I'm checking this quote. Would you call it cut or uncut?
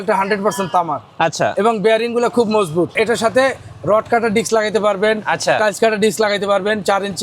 cut